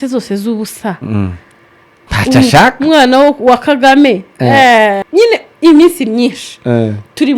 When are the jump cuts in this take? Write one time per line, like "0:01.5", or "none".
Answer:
0:05.0